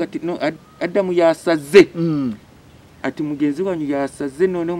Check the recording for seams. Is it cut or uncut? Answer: uncut